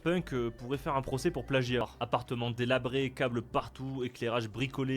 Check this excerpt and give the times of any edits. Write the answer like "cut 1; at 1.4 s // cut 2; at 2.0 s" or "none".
cut 1; at 1.8 s